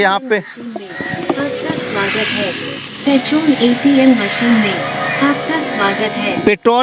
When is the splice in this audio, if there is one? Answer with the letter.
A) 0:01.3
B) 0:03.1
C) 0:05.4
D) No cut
D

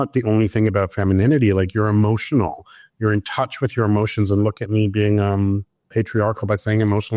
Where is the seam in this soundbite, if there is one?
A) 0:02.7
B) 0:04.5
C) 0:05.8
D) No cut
C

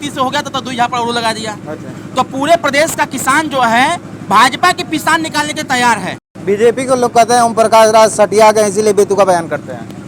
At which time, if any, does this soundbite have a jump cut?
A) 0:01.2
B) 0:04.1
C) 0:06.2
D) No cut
C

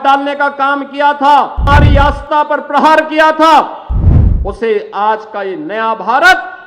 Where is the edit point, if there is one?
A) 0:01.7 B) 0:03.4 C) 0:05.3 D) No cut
A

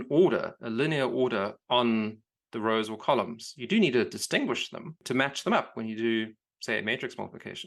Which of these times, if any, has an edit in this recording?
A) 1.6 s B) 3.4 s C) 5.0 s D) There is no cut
C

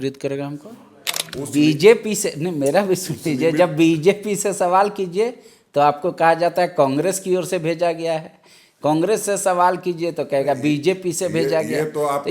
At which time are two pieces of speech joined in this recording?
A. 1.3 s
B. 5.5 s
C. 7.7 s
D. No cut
A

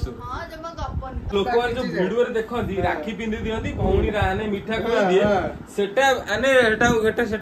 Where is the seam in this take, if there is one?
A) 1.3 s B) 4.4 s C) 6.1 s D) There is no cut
A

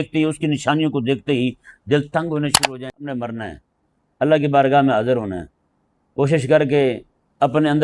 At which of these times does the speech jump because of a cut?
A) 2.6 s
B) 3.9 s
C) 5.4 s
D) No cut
A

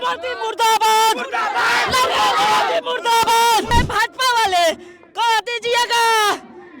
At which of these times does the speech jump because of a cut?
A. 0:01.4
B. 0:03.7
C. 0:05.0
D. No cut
B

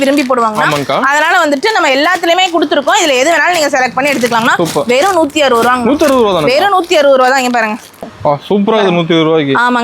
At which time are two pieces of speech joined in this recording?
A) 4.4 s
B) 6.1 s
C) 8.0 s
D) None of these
C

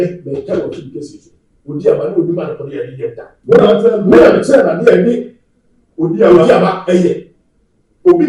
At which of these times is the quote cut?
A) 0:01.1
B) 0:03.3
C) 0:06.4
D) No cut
D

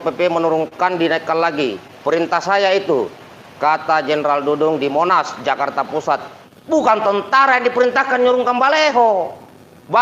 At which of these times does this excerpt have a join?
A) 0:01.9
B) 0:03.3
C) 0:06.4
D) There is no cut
C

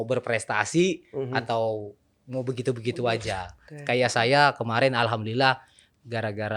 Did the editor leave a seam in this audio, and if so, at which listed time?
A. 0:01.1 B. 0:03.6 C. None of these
B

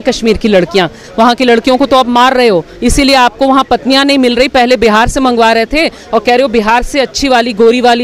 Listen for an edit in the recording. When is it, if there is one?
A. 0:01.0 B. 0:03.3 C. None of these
A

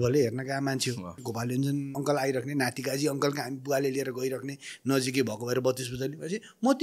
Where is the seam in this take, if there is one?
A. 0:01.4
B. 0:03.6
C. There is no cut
A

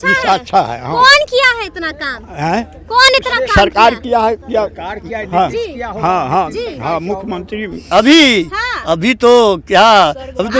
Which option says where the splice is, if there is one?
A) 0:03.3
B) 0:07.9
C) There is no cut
B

